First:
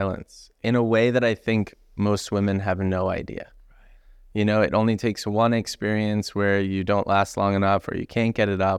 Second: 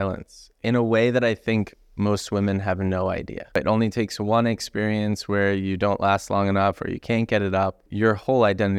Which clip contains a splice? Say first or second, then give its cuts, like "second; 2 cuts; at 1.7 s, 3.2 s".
second; 2 cuts; at 3.6 s, 7.9 s